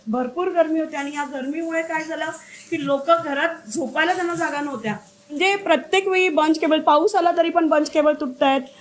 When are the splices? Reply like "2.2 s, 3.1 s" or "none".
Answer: 5.4 s